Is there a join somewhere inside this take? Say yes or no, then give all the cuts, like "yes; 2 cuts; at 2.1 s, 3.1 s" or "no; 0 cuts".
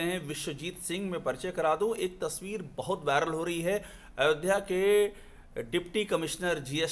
no; 0 cuts